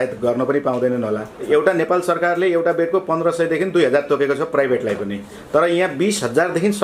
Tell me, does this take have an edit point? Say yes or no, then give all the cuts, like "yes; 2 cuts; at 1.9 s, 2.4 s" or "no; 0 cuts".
yes; 1 cut; at 1.4 s